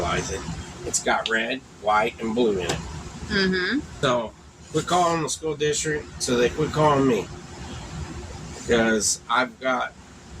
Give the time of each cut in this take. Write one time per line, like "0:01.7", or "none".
0:03.9

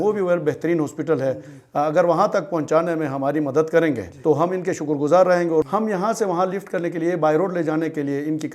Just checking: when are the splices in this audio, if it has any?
0:04.1
0:05.6

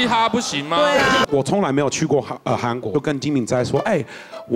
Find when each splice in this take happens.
0:01.3
0:02.9

